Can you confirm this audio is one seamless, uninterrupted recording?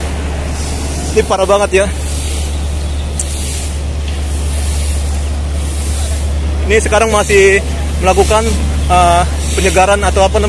yes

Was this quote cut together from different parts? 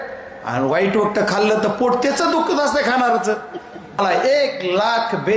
yes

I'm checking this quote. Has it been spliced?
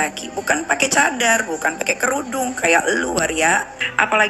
no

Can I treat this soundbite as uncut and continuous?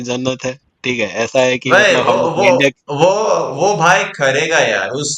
yes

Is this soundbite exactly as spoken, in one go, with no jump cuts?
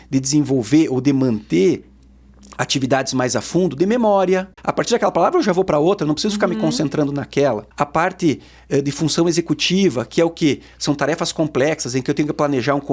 no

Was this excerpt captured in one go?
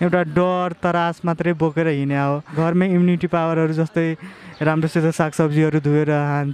no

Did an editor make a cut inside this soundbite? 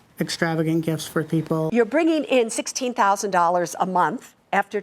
yes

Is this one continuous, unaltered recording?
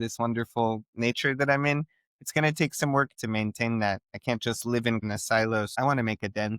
no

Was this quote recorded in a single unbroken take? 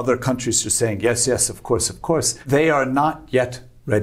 no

